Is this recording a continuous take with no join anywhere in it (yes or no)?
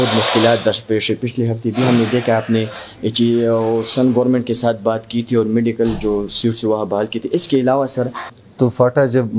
no